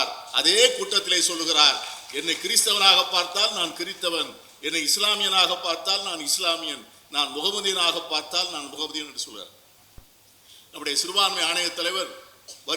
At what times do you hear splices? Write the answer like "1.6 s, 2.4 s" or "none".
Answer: none